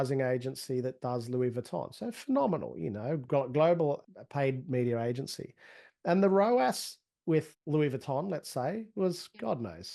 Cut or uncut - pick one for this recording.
cut